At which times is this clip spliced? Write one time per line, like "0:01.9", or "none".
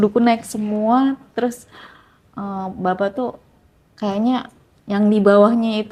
none

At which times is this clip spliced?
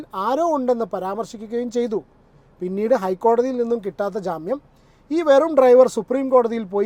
none

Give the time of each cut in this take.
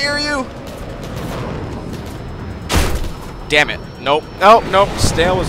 none

